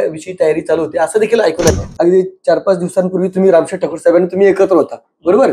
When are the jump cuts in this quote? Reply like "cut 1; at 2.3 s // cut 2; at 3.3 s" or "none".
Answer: cut 1; at 1.7 s

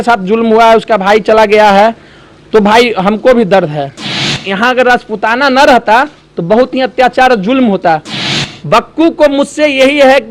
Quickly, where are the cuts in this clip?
cut 1; at 4.3 s // cut 2; at 8.2 s

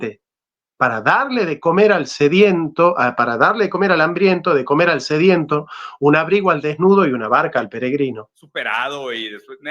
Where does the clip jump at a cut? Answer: cut 1; at 8.4 s

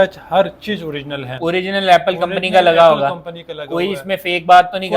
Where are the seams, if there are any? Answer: none

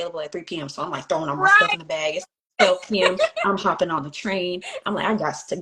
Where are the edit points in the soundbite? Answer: none

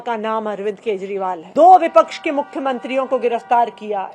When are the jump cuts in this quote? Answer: cut 1; at 1.4 s

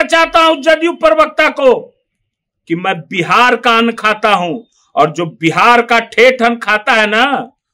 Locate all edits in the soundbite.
none

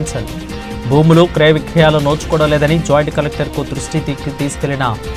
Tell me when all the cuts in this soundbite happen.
none

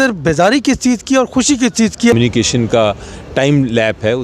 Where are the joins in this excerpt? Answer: cut 1; at 2.1 s

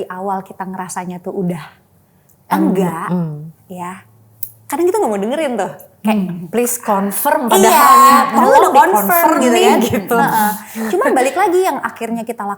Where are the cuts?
none

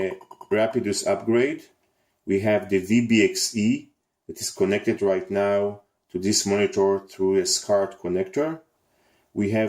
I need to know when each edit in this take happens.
cut 1; at 5.5 s

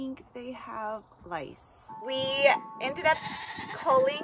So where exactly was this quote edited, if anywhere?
cut 1; at 1.9 s

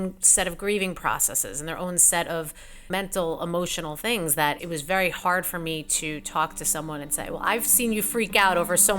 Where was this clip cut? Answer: cut 1; at 2.9 s // cut 2; at 4.6 s

